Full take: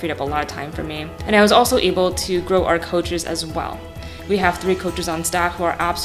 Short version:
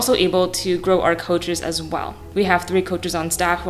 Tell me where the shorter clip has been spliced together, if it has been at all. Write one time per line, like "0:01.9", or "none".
0:02.2